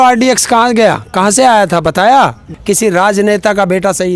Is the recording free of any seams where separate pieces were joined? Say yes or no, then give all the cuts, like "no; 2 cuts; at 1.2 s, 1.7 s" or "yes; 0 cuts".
no; 1 cut; at 2.5 s